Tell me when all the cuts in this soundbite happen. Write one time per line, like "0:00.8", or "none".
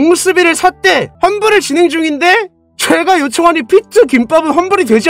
0:01.1